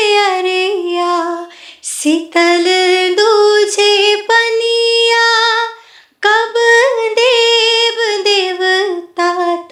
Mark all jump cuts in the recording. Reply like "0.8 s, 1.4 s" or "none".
none

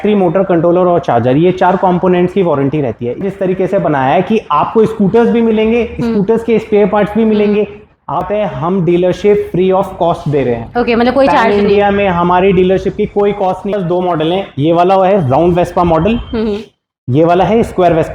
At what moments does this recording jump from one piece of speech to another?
3.2 s, 8.3 s, 13.8 s

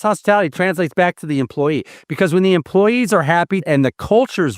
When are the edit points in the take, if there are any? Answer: 3.6 s

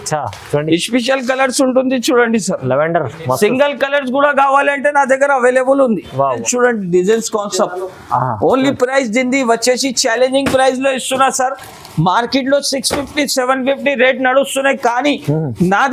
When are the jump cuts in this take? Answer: 6.4 s

